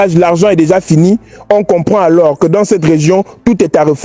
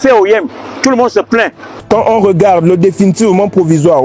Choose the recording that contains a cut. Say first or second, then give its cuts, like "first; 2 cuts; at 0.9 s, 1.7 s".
second; 1 cut; at 1.8 s